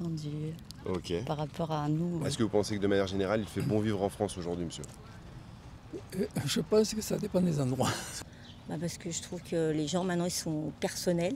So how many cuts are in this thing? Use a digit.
2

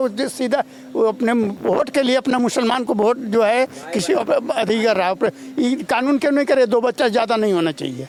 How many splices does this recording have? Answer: 0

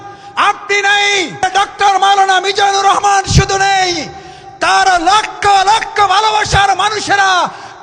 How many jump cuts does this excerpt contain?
1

